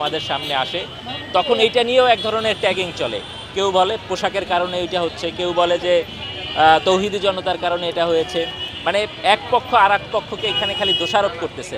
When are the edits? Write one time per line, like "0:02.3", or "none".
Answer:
none